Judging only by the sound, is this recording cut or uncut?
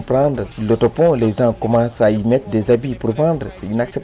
uncut